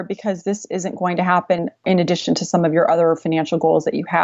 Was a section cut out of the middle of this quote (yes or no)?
yes